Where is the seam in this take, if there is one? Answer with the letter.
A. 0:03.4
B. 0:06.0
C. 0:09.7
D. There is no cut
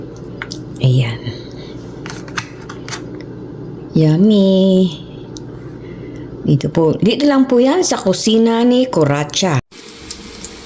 C